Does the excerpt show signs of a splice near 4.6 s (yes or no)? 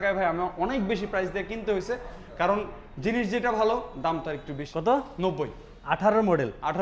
yes